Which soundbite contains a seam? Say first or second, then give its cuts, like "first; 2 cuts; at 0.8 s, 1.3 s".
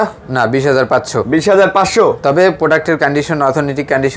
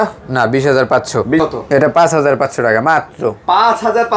second; 1 cut; at 1.4 s